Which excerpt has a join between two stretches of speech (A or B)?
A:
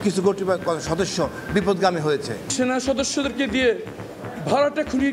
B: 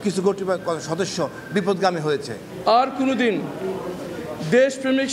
A